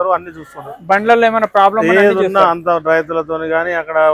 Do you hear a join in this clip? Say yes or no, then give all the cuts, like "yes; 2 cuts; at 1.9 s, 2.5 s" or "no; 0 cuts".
no; 0 cuts